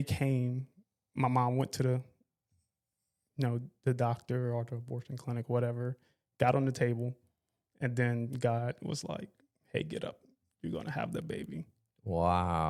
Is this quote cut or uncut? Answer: uncut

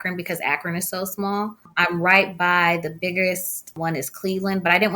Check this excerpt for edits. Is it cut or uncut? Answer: cut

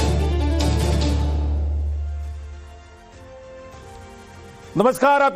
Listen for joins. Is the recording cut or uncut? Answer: uncut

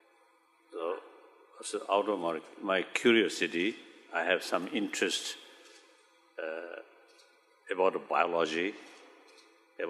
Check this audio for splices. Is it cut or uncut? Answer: cut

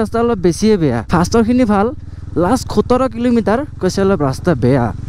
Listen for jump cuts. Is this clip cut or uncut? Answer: cut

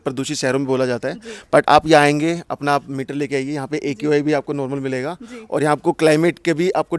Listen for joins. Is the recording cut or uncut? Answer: uncut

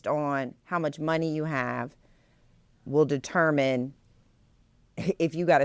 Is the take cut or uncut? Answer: uncut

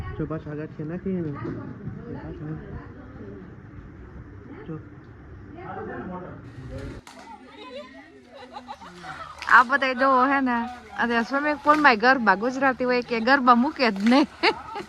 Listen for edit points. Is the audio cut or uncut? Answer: cut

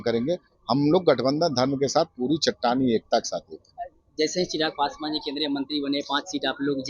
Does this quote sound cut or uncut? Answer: uncut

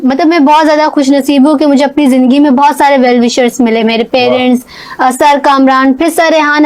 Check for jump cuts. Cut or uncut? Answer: uncut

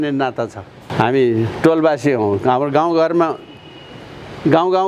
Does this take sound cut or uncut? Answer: uncut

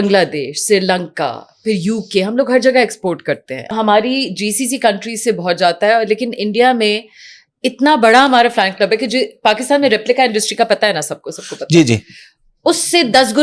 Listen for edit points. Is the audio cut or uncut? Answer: cut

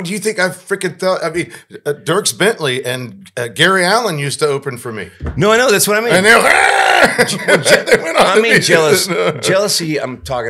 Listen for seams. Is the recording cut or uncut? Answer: uncut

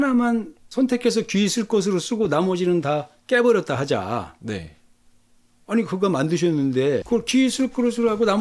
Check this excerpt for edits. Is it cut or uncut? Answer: cut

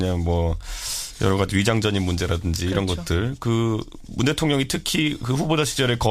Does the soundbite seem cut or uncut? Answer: cut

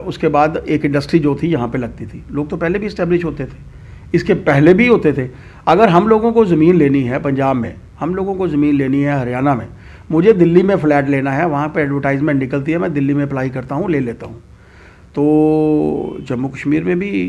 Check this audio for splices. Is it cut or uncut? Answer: uncut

